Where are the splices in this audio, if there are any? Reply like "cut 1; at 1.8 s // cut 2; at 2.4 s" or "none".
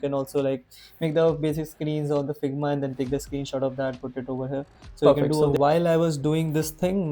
cut 1; at 5.1 s

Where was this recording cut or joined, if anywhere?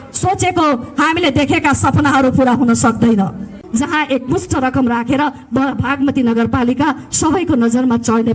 cut 1; at 3.6 s

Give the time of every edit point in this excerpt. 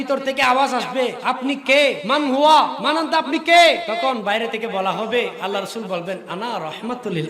cut 1; at 1.2 s // cut 2; at 2.0 s // cut 3; at 2.8 s // cut 4; at 3.9 s

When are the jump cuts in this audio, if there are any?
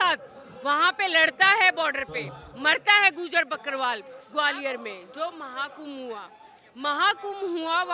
cut 1; at 4.1 s

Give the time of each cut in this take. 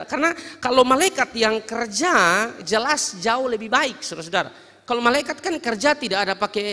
cut 1; at 2.6 s

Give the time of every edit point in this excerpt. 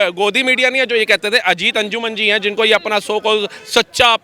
none

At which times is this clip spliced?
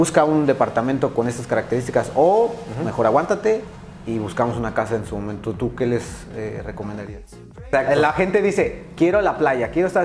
cut 1; at 7.6 s

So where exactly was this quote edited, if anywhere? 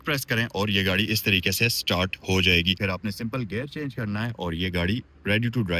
none

